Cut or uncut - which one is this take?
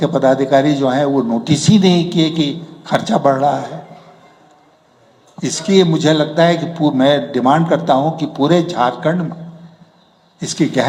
uncut